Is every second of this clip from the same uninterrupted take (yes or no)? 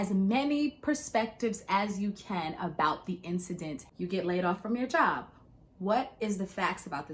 yes